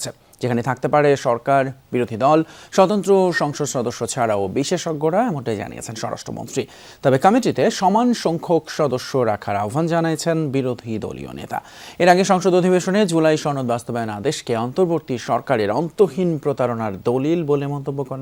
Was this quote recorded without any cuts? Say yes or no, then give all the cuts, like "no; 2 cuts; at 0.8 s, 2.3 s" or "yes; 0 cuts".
yes; 0 cuts